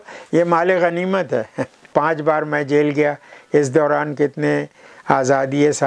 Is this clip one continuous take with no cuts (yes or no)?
no